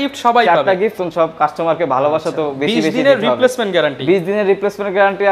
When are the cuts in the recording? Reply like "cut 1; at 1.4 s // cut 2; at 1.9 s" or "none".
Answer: cut 1; at 1.0 s